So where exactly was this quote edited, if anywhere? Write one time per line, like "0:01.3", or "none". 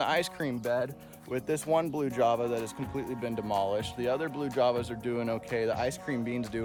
none